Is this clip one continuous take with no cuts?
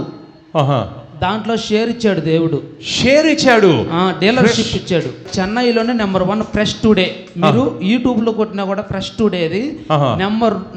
no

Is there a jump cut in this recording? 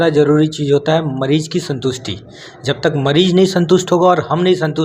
no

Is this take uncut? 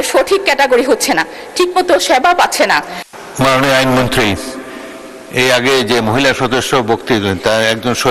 no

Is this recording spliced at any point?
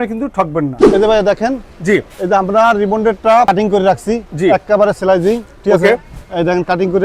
yes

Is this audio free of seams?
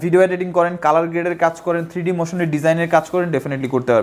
yes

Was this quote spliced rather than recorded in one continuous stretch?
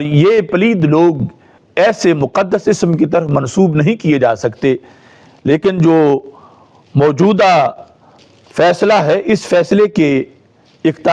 no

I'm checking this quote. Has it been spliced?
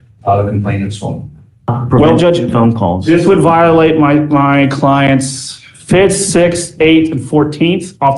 yes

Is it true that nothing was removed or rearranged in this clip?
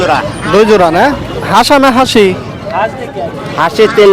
no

